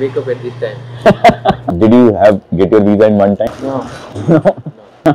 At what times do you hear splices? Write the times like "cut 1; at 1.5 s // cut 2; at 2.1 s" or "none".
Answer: cut 1; at 1.6 s // cut 2; at 3.5 s